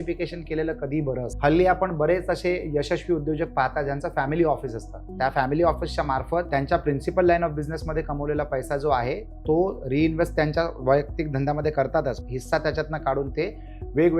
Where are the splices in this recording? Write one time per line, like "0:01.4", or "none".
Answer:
0:01.3
0:06.5
0:12.2